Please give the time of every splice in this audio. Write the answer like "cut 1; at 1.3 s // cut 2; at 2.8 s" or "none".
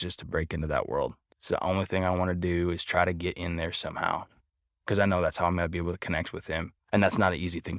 cut 1; at 1.3 s // cut 2; at 6.7 s